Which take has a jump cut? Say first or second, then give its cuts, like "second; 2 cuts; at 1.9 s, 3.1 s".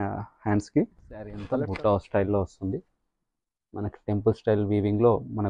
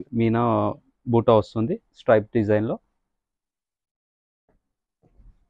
first; 1 cut; at 1.4 s